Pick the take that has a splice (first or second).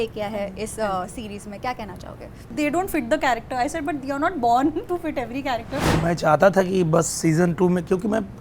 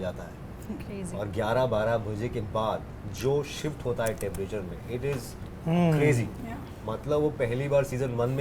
first